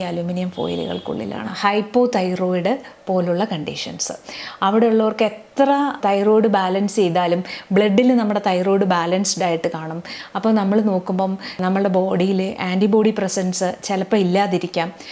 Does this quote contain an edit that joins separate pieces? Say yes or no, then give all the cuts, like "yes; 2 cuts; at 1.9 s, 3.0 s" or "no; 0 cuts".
yes; 3 cuts; at 1.5 s, 6.0 s, 11.5 s